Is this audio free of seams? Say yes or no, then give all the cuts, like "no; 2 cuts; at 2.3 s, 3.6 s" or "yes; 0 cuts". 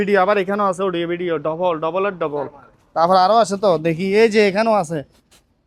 yes; 0 cuts